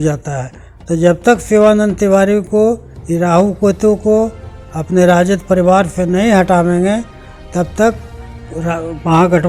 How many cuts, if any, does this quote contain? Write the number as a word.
zero